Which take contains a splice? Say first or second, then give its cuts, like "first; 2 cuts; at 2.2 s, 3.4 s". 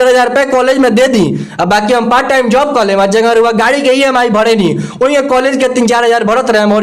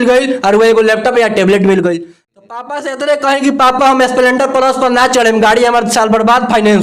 second; 1 cut; at 2.1 s